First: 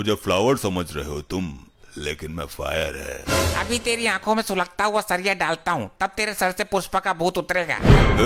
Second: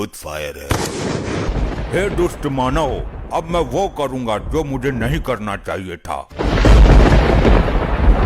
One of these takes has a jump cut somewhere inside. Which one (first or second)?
second